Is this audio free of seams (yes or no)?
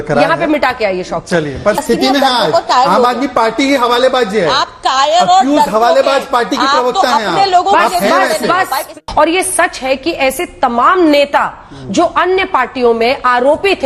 no